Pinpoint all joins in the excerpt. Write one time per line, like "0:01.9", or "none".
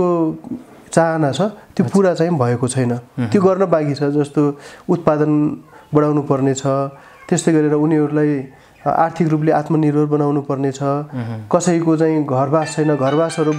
none